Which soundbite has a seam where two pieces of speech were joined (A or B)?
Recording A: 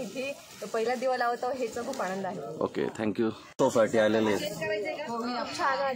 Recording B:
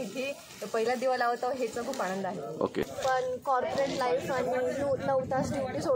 B